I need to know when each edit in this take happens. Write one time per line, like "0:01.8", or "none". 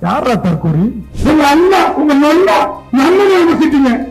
0:01.1
0:02.8